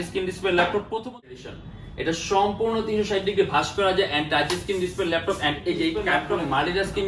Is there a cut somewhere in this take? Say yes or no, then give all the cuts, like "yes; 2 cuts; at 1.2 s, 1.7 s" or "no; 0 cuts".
yes; 2 cuts; at 1.4 s, 6.1 s